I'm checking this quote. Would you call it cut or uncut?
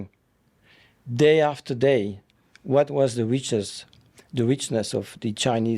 uncut